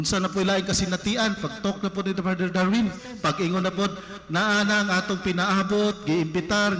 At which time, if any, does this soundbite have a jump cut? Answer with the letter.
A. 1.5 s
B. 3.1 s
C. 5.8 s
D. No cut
B